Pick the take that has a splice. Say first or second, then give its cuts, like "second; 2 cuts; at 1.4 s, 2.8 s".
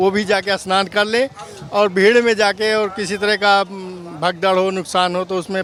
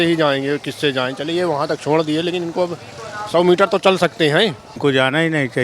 second; 1 cut; at 4.7 s